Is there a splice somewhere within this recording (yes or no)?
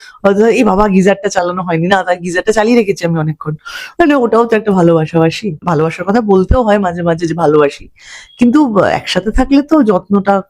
yes